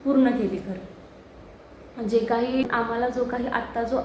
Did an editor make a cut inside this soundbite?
yes; 1 cut; at 2.7 s

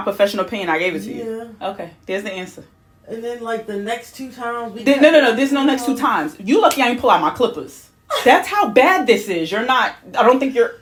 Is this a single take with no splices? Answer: yes; 0 cuts

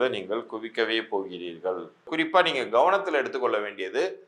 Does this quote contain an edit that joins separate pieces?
yes; 1 cut; at 2.1 s

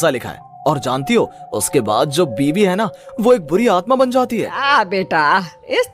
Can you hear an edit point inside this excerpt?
yes; 1 cut; at 4.6 s

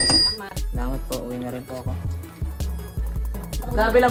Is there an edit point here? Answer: no; 0 cuts

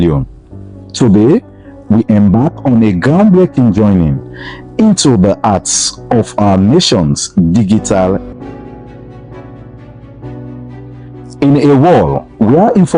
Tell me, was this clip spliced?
yes; 1 cut; at 8.3 s

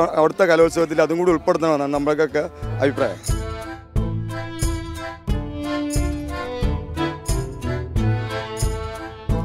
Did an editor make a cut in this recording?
yes; 1 cut; at 3.2 s

